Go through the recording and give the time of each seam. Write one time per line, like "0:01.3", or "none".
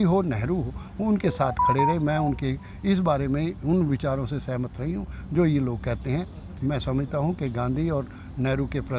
none

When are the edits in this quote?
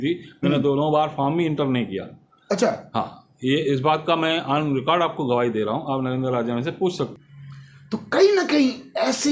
0:07.1

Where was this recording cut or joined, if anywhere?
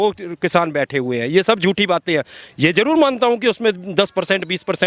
none

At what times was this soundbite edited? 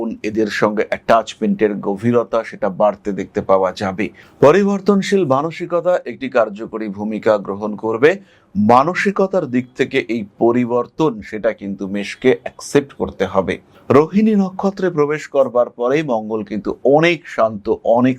0:04.2

